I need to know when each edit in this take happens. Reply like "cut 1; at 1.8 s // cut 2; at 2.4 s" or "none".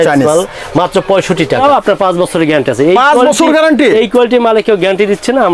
cut 1; at 1.6 s

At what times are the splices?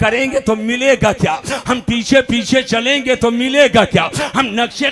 none

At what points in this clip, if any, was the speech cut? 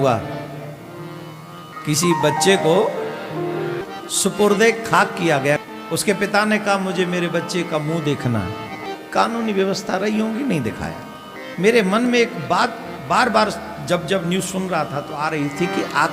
cut 1; at 1.7 s // cut 2; at 3.8 s // cut 3; at 5.6 s // cut 4; at 8.8 s // cut 5; at 11.4 s

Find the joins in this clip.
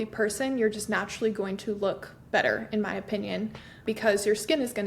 cut 1; at 3.8 s

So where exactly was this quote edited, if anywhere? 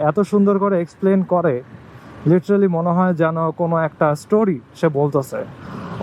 none

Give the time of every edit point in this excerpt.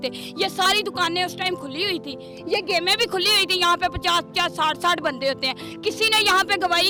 none

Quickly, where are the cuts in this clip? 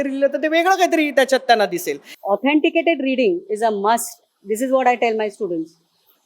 cut 1; at 2.1 s

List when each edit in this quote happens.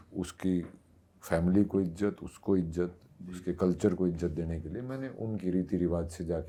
none

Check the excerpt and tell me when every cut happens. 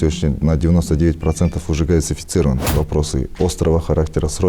cut 1; at 2.7 s

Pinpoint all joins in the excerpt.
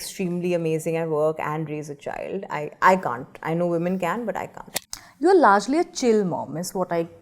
cut 1; at 4.6 s

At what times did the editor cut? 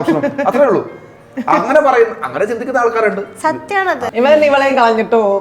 cut 1; at 4.0 s

